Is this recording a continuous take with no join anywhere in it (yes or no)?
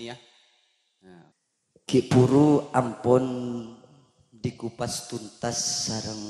no